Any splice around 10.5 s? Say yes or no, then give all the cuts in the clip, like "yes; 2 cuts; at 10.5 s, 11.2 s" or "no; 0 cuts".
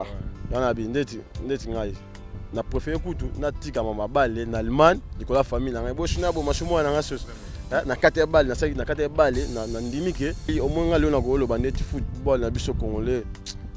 yes; 1 cut; at 10.5 s